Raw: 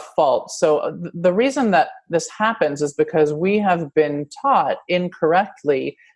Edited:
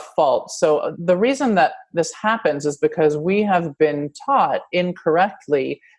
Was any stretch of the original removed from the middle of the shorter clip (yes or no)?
yes